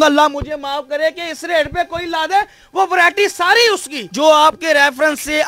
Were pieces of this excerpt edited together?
yes; 1 cut; at 4.0 s

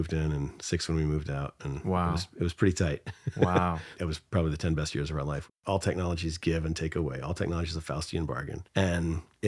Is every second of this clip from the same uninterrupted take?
no; 3 cuts; at 3.9 s, 5.5 s, 8.6 s

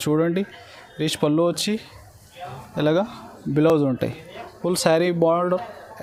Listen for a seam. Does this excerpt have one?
no; 0 cuts

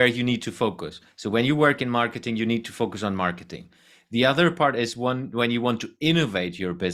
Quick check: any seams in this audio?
no; 0 cuts

